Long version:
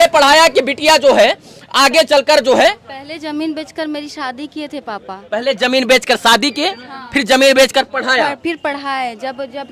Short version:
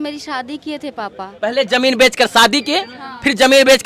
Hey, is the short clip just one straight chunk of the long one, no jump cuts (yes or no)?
yes